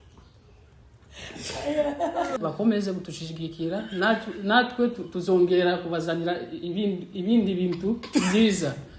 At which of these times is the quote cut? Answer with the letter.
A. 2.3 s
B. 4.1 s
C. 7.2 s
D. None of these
A